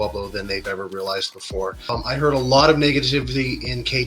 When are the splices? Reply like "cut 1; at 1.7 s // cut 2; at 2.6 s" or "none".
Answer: cut 1; at 1.9 s